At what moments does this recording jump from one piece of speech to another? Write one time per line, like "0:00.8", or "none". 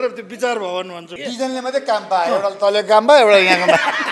0:01.1